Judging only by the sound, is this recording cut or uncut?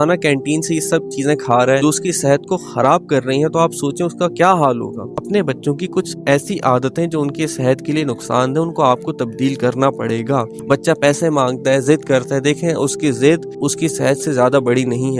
cut